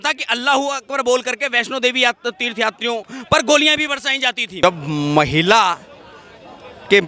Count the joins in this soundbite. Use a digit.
1